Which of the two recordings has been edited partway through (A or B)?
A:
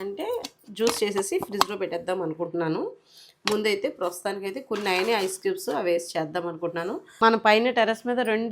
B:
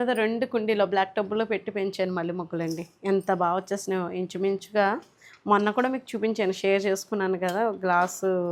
A